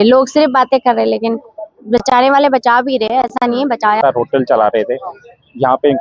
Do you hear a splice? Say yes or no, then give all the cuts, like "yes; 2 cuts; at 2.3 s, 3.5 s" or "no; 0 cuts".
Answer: yes; 1 cut; at 4.0 s